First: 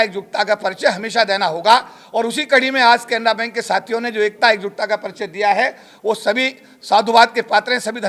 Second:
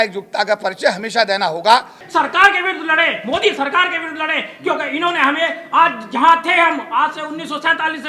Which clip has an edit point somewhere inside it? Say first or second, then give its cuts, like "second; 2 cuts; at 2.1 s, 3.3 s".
second; 1 cut; at 2.0 s